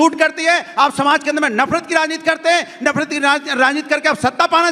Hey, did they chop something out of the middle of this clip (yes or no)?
no